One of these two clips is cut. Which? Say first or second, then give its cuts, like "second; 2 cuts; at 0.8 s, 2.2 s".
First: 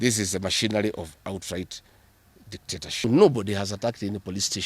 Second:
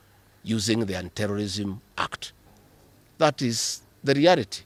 first; 1 cut; at 3.0 s